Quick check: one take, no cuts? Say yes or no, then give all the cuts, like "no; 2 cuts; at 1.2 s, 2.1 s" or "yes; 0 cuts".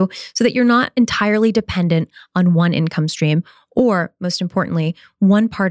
yes; 0 cuts